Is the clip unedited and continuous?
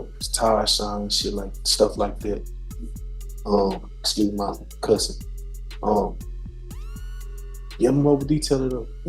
yes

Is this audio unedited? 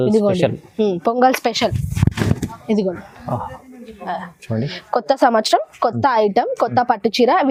yes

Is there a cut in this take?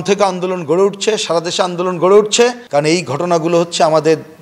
yes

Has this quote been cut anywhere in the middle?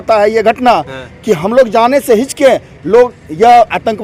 no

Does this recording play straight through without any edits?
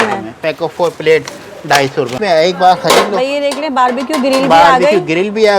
no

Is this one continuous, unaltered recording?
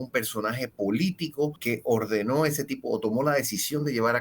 no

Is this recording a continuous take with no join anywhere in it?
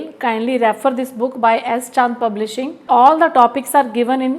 no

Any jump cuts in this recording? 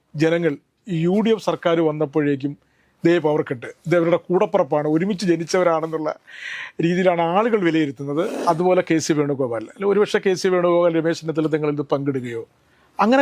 yes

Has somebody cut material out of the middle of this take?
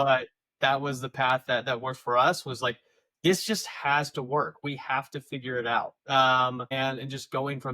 yes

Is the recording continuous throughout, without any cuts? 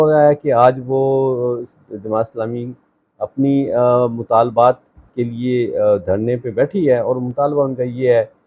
yes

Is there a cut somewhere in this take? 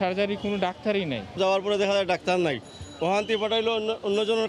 no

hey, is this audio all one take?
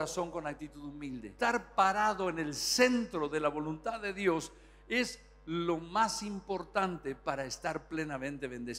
no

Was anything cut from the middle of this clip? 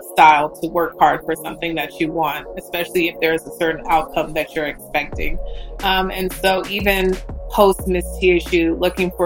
no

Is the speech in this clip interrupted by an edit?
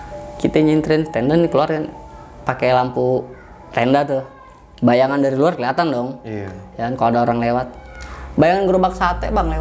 no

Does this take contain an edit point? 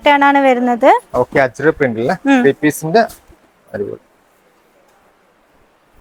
no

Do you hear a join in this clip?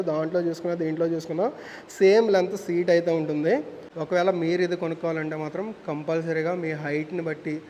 yes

